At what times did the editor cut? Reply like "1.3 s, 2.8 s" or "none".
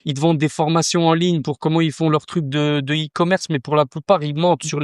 none